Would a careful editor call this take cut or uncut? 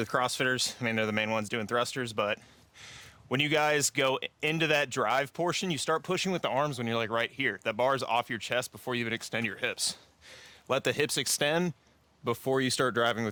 uncut